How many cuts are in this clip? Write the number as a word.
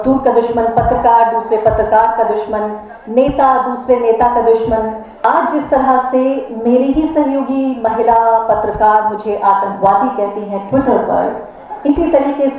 one